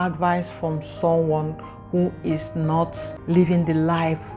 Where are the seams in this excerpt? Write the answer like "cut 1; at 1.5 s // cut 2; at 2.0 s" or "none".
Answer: cut 1; at 3.1 s